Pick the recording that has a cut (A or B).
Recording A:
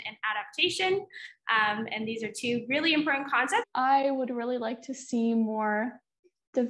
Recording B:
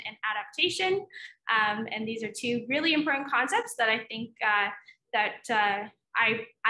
A